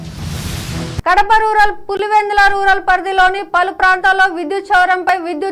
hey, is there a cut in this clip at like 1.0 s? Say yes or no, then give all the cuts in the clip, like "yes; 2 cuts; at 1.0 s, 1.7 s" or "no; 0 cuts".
no; 0 cuts